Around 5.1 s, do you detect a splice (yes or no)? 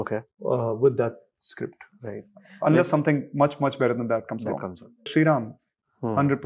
yes